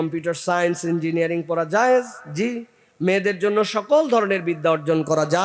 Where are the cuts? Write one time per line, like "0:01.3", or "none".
none